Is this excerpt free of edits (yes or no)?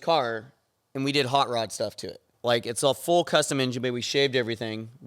no